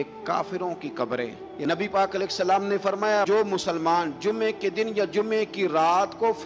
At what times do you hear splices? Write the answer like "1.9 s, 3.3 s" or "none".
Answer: 1.4 s

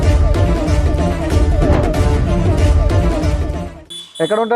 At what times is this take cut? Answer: none

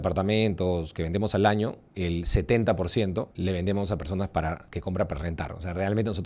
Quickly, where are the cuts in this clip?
1.9 s, 3.3 s, 4.7 s

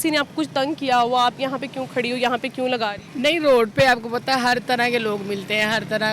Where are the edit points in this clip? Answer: none

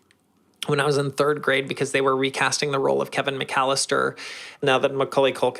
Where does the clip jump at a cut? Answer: 4.6 s

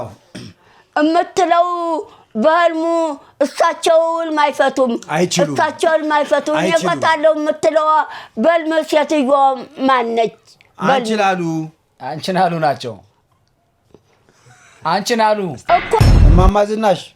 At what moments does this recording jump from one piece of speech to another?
16.0 s

